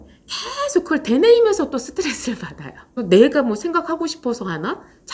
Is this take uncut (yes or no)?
no